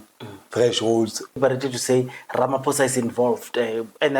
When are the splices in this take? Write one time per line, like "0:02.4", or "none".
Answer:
0:01.4